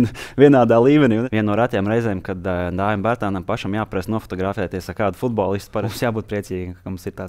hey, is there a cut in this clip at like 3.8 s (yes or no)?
no